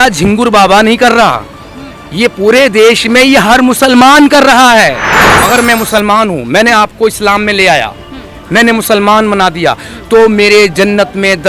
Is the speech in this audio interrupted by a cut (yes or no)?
yes